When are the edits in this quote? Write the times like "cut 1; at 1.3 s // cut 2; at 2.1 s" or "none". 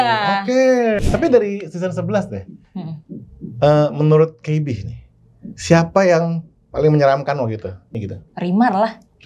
cut 1; at 1.0 s // cut 2; at 7.9 s